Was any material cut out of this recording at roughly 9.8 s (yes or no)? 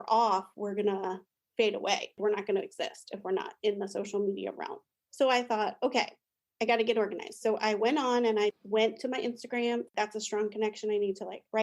yes